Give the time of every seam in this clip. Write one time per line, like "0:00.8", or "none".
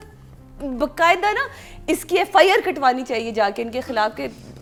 none